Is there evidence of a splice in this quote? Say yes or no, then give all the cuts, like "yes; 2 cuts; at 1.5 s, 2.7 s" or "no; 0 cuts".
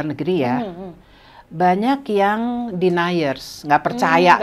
no; 0 cuts